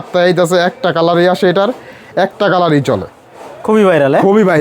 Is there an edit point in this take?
no; 0 cuts

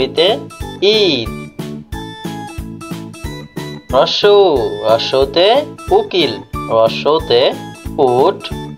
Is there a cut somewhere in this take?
yes; 2 cuts; at 1.5 s, 3.9 s

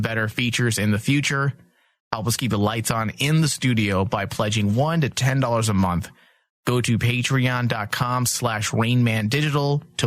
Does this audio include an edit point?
no; 0 cuts

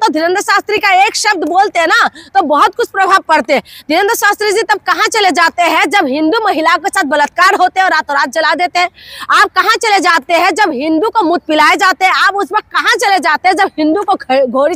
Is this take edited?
no; 0 cuts

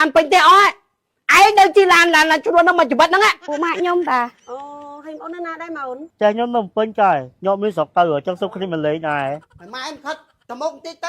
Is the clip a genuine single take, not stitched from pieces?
no; 2 cuts; at 3.4 s, 9.5 s

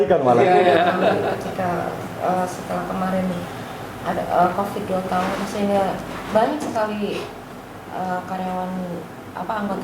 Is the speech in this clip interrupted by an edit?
yes; 1 cut; at 1.3 s

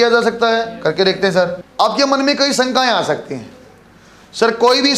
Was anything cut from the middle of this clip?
yes; 1 cut; at 1.6 s

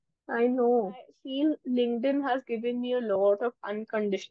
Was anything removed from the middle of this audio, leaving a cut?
yes; 1 cut; at 1.2 s

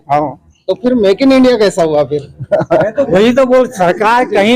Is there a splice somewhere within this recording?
yes; 1 cut; at 3.1 s

